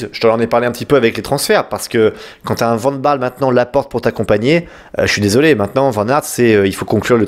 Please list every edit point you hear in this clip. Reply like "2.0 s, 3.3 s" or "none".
none

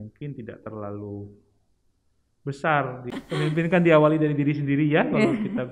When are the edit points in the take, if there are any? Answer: 3.0 s

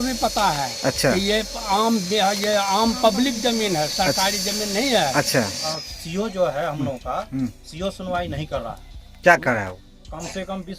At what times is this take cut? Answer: 5.6 s

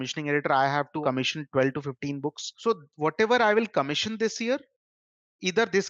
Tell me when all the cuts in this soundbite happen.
1.0 s, 2.5 s

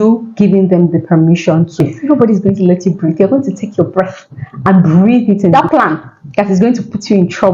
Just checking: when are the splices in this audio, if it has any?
1.9 s, 5.5 s

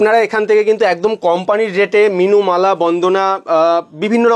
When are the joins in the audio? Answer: none

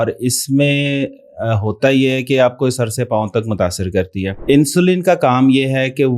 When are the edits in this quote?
4.4 s

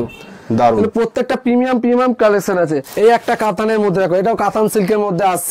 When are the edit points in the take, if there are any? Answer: 2.8 s

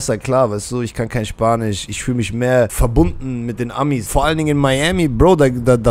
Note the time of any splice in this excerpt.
2.7 s, 4.0 s

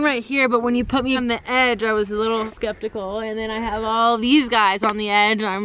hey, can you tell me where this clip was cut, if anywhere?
1.2 s, 2.5 s

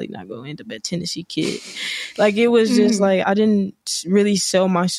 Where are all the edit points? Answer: 3.2 s

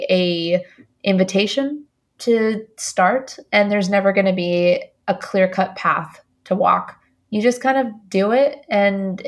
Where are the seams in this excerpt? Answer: none

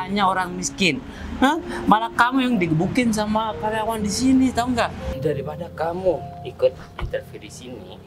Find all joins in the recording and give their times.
5.0 s

